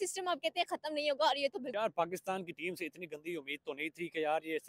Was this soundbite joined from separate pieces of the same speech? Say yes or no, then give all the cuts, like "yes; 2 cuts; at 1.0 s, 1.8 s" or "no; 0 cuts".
yes; 1 cut; at 1.7 s